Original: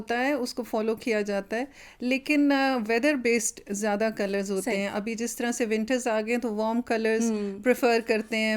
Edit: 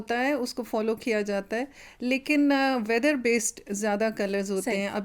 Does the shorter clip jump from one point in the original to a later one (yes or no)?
no